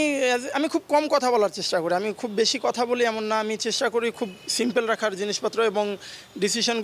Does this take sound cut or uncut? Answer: uncut